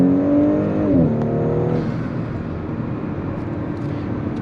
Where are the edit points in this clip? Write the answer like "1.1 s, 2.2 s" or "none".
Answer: none